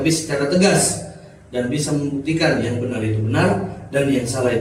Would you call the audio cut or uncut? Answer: uncut